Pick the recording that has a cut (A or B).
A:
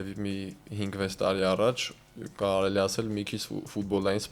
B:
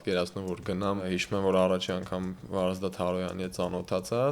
B